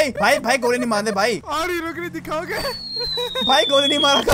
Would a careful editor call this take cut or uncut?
cut